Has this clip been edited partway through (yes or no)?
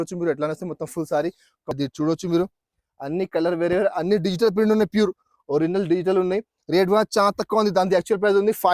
yes